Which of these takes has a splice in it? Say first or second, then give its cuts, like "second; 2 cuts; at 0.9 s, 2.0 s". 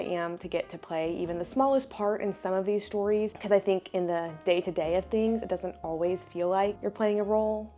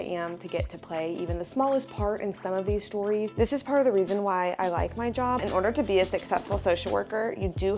second; 2 cuts; at 3.3 s, 5.4 s